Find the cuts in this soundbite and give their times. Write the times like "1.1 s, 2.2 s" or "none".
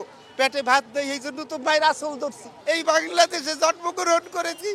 2.5 s